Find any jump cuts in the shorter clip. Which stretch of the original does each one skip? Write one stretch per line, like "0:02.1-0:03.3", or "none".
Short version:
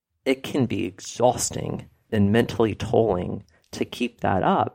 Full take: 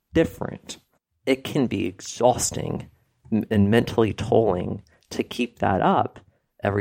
0:03.1-0:03.5